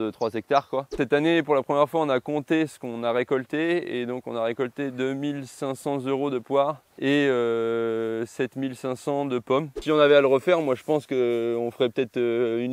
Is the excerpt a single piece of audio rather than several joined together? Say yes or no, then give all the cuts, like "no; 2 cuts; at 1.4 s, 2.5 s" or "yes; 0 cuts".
no; 3 cuts; at 1.0 s, 6.9 s, 9.8 s